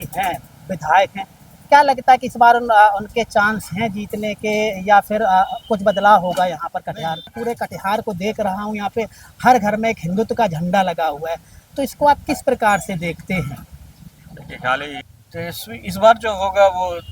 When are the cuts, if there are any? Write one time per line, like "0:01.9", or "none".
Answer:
0:07.4
0:15.0